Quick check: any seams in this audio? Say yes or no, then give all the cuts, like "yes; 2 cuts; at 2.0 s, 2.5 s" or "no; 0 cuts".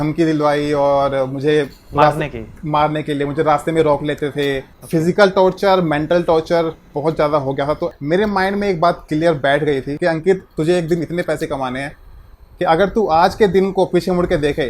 yes; 3 cuts; at 4.7 s, 7.9 s, 9.9 s